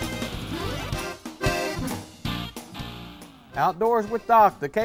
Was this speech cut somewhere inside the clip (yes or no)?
no